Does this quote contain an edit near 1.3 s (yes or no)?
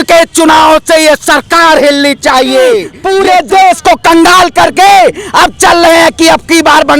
no